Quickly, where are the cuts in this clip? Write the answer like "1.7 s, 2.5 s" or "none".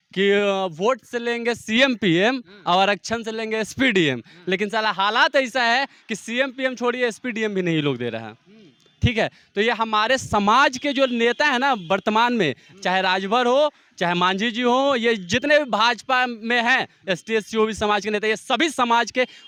none